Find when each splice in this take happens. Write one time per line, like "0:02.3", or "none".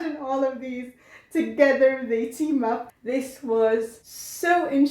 0:02.9